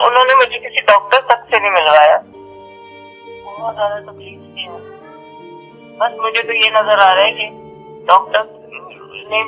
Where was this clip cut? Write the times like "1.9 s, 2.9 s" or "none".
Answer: 2.4 s

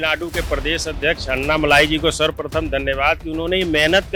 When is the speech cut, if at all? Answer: none

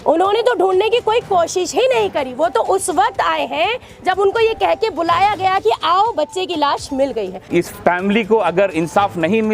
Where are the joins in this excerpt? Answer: 7.5 s

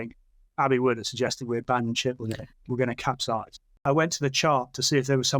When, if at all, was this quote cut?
3.8 s

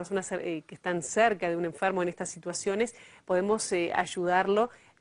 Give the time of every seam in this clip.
none

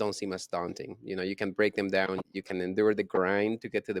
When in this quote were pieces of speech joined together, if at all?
2.3 s

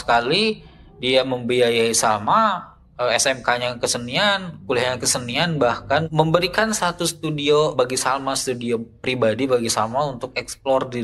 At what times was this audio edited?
6.1 s, 7.7 s

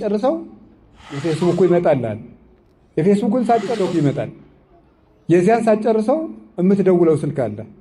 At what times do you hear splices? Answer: 1.2 s, 3.7 s

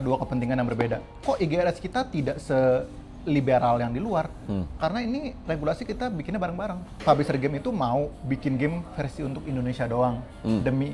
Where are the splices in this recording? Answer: 1.2 s, 7.0 s

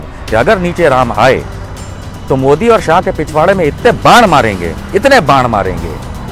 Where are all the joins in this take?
none

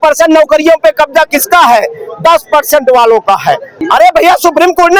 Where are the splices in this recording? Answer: 3.7 s

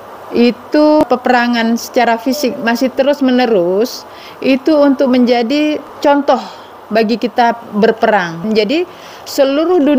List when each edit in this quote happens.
1.0 s, 5.9 s, 8.4 s

